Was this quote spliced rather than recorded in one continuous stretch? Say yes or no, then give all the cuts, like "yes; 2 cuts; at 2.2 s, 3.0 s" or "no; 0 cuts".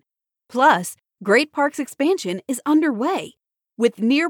no; 0 cuts